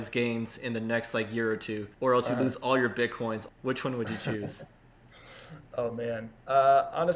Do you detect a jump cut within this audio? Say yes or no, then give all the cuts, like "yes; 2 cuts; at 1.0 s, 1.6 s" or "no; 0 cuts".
no; 0 cuts